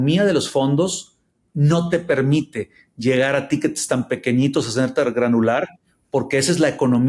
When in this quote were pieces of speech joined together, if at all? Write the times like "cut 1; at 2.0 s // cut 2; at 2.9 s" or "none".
none